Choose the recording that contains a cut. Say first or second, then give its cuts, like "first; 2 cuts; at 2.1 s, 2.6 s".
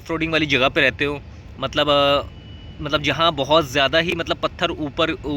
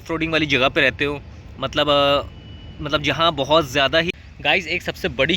second; 1 cut; at 4.1 s